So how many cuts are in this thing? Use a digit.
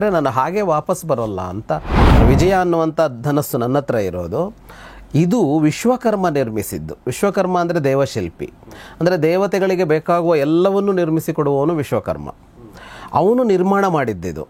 1